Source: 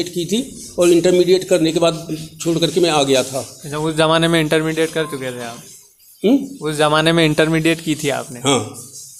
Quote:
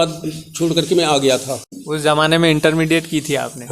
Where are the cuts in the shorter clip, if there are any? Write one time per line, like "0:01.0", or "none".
0:01.8